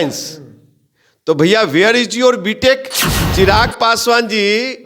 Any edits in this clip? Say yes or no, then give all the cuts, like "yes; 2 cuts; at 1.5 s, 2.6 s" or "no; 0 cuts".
yes; 1 cut; at 3.2 s